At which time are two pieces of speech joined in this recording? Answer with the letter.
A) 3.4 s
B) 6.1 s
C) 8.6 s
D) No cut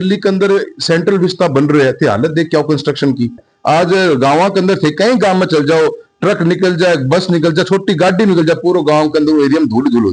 A